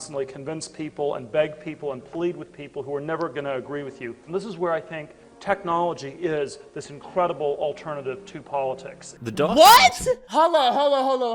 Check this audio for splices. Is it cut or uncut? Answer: cut